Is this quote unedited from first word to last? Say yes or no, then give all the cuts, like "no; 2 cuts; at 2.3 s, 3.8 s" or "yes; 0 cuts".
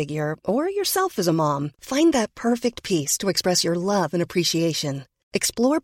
yes; 0 cuts